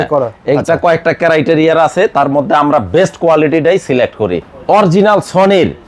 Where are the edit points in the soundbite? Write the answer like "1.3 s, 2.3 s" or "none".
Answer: 4.5 s